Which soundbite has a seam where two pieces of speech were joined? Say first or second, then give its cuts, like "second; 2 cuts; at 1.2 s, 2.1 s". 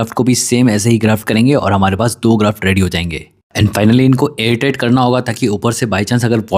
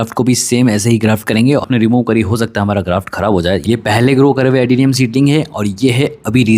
second; 2 cuts; at 1.6 s, 3.6 s